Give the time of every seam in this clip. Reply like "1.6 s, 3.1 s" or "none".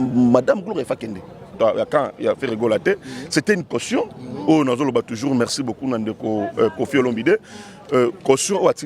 1.6 s